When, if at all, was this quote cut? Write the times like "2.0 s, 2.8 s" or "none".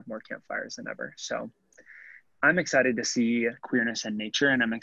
3.6 s